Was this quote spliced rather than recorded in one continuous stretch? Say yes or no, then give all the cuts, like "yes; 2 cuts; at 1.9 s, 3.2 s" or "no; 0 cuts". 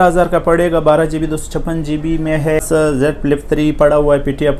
yes; 1 cut; at 2.7 s